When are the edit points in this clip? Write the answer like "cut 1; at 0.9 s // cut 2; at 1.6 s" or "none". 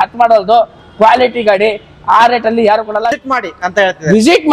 cut 1; at 3.2 s